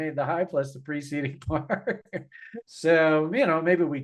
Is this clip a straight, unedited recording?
no; 1 cut; at 2.6 s

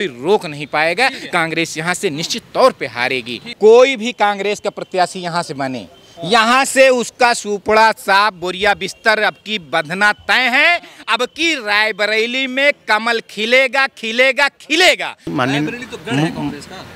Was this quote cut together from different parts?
yes; 2 cuts; at 3.5 s, 15.3 s

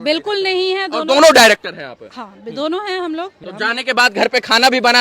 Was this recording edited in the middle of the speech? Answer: yes; 1 cut; at 3.4 s

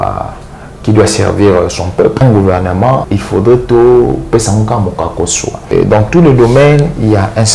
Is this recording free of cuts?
no; 3 cuts; at 2.2 s, 3.1 s, 5.6 s

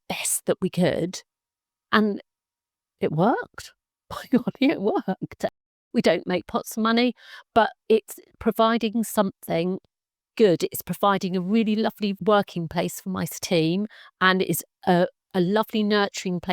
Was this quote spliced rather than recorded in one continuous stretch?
yes; 3 cuts; at 5.5 s, 12.2 s, 13.4 s

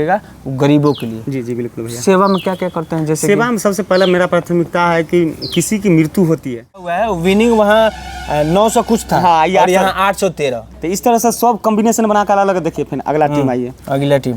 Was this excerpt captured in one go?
no; 1 cut; at 6.9 s

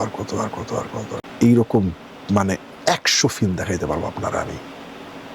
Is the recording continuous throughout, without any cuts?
no; 1 cut; at 1.2 s

